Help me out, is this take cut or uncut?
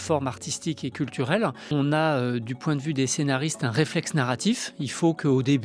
cut